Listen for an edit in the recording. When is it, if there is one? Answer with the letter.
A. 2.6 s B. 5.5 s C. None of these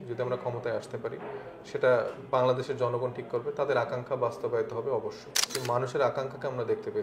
B